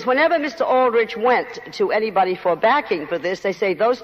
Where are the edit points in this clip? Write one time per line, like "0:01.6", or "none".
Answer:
0:01.5